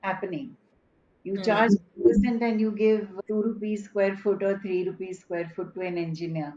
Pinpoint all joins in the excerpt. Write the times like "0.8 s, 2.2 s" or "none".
none